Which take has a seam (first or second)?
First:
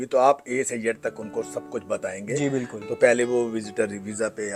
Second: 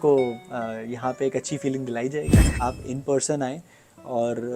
second